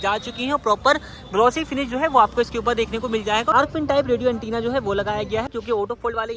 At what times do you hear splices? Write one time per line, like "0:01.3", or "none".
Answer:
0:03.5
0:05.5